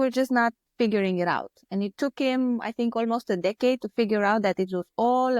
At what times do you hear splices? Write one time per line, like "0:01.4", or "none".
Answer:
none

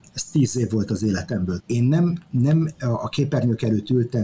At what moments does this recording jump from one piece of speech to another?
0:01.6

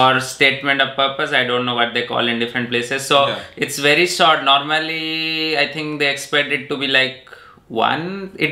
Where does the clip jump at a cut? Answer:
none

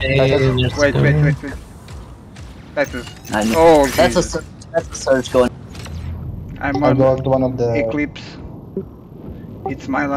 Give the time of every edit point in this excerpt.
0:05.5

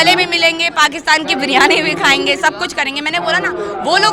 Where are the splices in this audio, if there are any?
none

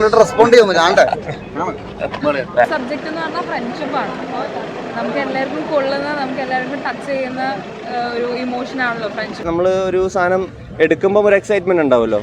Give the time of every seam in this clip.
0:02.7
0:09.5

